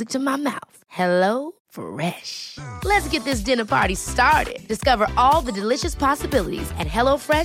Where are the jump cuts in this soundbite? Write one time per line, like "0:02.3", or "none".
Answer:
none